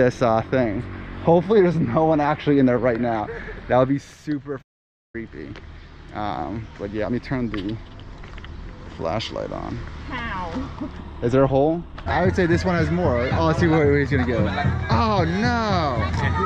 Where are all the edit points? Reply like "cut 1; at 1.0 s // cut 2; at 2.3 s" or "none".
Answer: cut 1; at 12.0 s